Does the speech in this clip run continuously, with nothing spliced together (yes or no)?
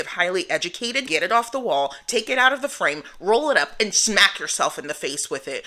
no